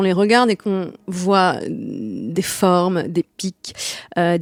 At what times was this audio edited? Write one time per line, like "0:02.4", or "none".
none

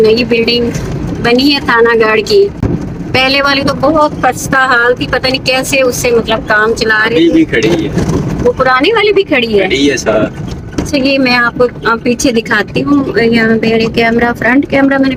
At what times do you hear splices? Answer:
none

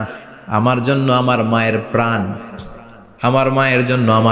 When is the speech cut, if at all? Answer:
none

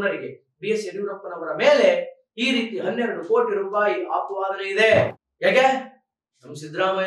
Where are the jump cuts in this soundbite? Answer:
0:05.2

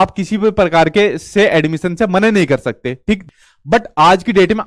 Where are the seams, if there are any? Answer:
0:03.2

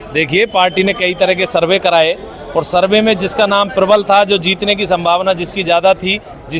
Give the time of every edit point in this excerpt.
none

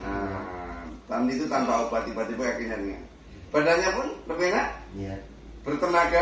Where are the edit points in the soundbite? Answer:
none

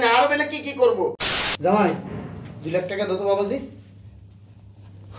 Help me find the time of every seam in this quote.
0:01.2

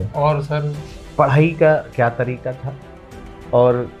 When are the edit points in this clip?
0:00.9

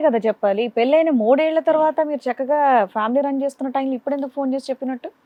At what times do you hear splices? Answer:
none

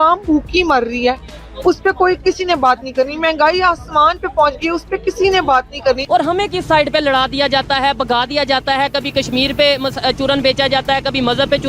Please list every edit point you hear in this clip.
0:06.0

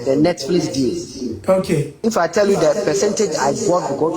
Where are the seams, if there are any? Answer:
0:01.3
0:01.9

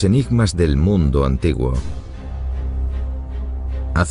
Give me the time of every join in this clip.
none

